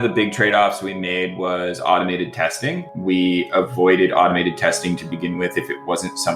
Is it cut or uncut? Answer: uncut